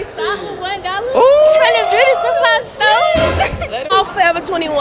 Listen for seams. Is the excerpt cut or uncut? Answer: cut